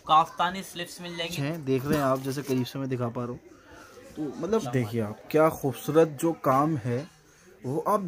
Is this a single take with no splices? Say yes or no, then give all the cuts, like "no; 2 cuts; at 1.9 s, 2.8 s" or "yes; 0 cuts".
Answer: no; 2 cuts; at 1.4 s, 4.7 s